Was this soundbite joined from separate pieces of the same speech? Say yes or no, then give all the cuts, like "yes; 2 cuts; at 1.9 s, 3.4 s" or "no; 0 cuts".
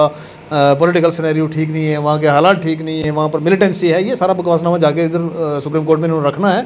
no; 0 cuts